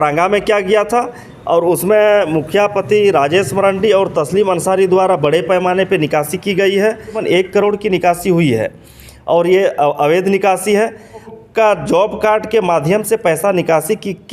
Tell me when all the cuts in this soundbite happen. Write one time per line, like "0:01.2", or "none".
0:07.2
0:11.3